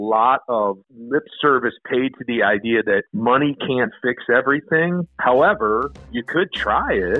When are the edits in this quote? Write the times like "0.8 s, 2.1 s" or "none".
0.9 s, 3.1 s, 5.1 s, 6.1 s